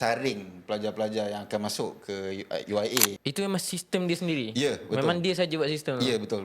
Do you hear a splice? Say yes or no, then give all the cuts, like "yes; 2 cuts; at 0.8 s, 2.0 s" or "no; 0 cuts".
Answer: yes; 1 cut; at 3.2 s